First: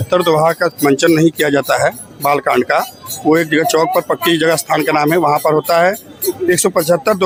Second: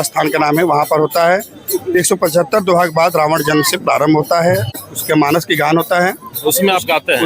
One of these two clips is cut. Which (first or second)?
second